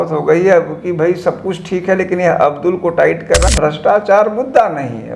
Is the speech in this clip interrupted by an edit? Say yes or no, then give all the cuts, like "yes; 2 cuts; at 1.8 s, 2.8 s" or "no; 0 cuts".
yes; 1 cut; at 3.4 s